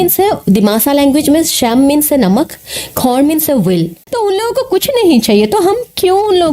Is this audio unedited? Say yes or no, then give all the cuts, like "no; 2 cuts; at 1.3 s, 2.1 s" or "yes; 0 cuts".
no; 1 cut; at 4.0 s